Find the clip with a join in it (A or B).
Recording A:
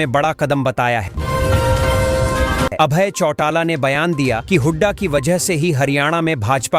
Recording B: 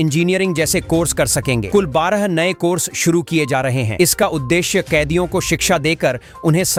A